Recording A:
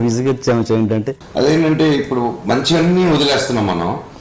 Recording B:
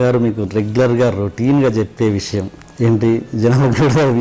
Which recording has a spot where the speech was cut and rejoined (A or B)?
A